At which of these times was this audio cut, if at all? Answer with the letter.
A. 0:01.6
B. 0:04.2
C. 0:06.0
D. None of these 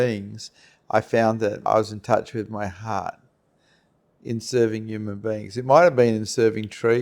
A